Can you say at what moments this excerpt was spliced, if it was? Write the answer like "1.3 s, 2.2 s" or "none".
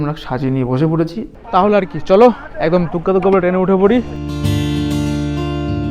1.3 s, 4.1 s